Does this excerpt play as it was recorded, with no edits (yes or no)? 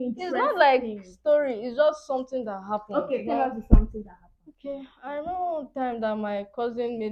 yes